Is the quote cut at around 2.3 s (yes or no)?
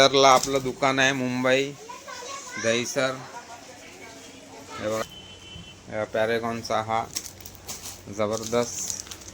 no